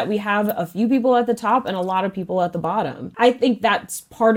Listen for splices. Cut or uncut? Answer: cut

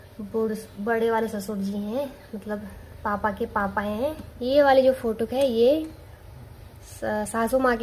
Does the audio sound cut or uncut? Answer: cut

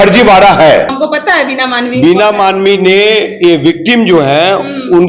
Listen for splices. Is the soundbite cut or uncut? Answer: cut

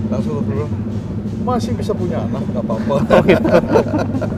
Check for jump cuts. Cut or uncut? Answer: uncut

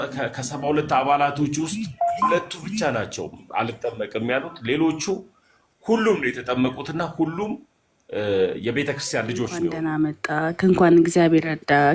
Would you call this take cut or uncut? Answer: cut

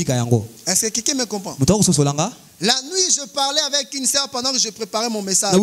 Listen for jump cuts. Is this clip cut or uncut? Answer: cut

